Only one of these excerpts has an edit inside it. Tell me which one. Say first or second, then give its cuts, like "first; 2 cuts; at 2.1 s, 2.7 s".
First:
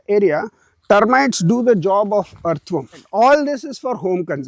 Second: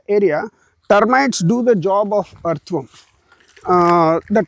first; 1 cut; at 3.1 s